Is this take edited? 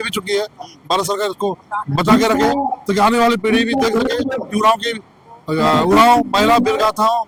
no; 0 cuts

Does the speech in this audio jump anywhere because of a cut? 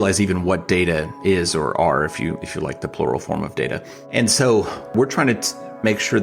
yes; 2 cuts; at 3.9 s, 4.9 s

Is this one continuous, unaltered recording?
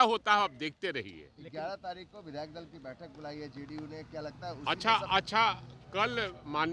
yes; 0 cuts

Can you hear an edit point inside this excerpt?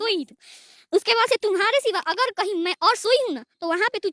no; 0 cuts

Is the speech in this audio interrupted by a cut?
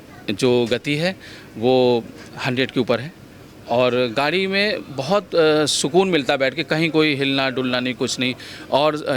no; 0 cuts

